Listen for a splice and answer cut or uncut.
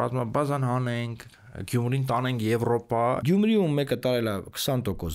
cut